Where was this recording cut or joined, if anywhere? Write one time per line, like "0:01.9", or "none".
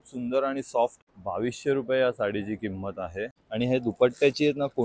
0:01.0
0:03.3